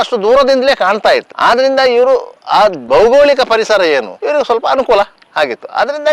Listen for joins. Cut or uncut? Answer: uncut